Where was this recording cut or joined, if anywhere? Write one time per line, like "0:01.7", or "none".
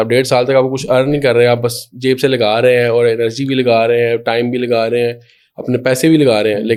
none

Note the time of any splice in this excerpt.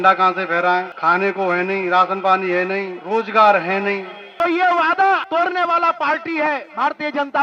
0:00.9
0:03.0
0:04.2
0:05.2

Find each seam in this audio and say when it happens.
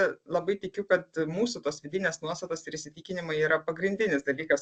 none

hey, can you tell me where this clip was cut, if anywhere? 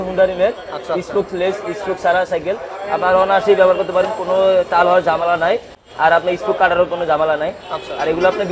none

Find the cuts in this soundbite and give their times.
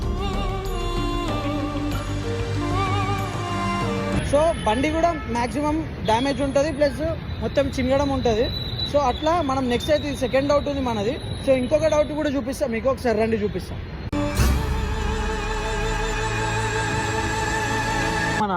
none

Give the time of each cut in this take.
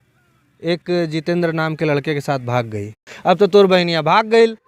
0:03.0

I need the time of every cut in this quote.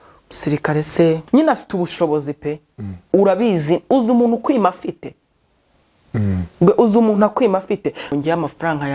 0:01.2
0:08.1

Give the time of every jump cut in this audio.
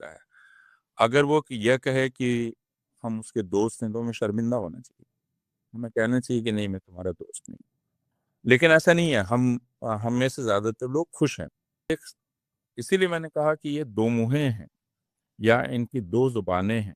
0:11.9

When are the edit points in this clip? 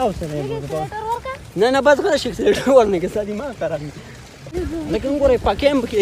0:04.5

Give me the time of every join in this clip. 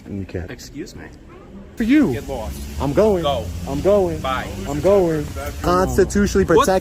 0:01.8
0:05.6

